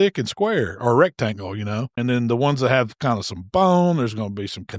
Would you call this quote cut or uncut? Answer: cut